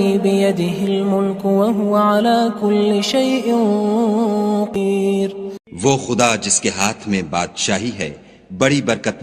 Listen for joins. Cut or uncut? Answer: cut